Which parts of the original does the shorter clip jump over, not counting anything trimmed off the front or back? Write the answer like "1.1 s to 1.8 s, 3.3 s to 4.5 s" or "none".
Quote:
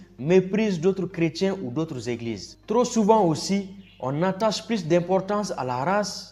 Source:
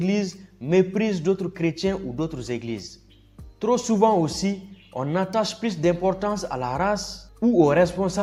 2.9 s to 3.4 s